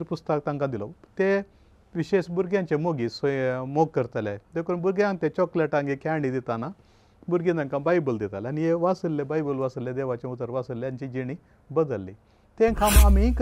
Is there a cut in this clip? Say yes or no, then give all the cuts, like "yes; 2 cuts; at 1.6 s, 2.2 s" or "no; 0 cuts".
no; 0 cuts